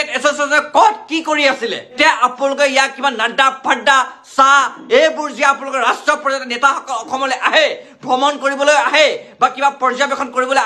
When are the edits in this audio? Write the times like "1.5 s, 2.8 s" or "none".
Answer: 2.0 s